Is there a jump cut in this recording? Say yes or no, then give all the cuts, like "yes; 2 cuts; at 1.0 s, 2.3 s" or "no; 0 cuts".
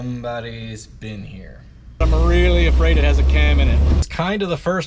yes; 2 cuts; at 2.0 s, 4.1 s